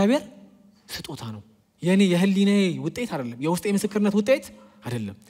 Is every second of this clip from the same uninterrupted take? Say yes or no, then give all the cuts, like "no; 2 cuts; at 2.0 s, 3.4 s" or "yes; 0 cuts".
no; 1 cut; at 1.6 s